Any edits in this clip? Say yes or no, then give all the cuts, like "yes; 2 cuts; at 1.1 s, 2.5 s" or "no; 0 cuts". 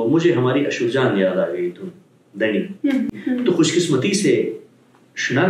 yes; 1 cut; at 3.2 s